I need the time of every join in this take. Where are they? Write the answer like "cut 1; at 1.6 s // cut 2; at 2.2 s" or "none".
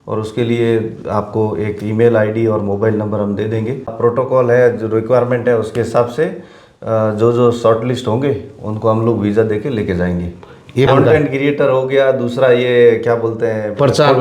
cut 1; at 3.9 s // cut 2; at 10.9 s

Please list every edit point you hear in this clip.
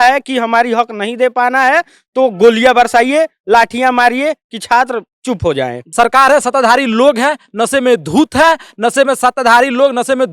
cut 1; at 5.8 s

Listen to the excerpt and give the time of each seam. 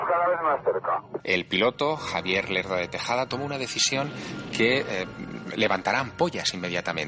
cut 1; at 1.1 s

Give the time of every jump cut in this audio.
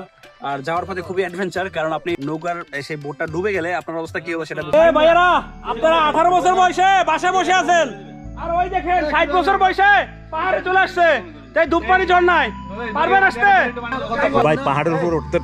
cut 1; at 2.2 s // cut 2; at 4.7 s

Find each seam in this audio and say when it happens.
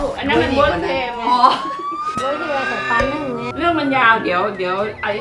cut 1; at 3.5 s

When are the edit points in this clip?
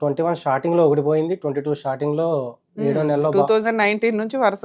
none

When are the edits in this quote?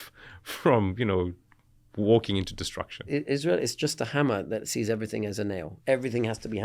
cut 1; at 3.1 s

